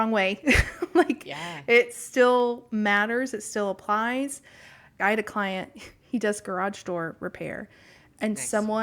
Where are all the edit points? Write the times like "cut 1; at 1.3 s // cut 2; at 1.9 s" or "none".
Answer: cut 1; at 5.0 s

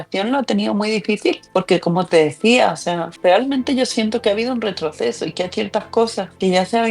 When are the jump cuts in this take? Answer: cut 1; at 1.4 s // cut 2; at 3.1 s

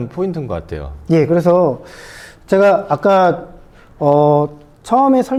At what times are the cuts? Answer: none

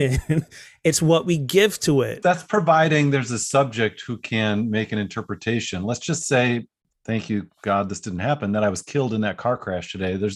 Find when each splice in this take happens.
cut 1; at 2.2 s // cut 2; at 6.8 s

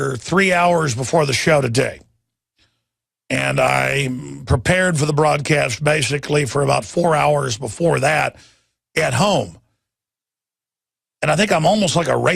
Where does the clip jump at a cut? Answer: cut 1; at 10.3 s

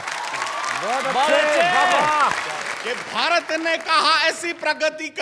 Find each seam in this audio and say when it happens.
cut 1; at 2.7 s

